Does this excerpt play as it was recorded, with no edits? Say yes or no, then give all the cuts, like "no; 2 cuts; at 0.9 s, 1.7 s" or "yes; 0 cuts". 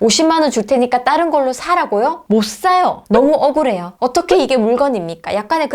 no; 1 cut; at 3.0 s